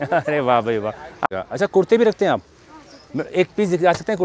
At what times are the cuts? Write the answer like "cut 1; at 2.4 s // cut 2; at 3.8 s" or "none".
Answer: cut 1; at 1.2 s